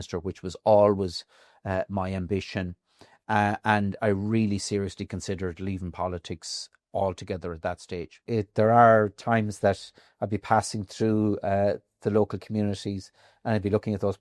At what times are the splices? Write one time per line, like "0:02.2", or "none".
0:08.2